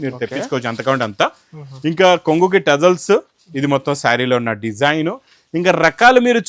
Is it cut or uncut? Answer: uncut